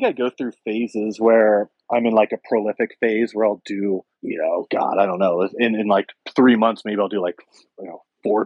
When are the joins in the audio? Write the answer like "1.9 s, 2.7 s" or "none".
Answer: 1.8 s, 4.2 s